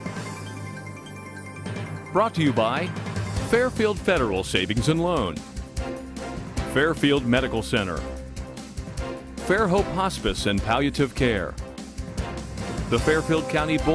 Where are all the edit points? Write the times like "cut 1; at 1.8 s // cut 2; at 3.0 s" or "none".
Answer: cut 1; at 11.6 s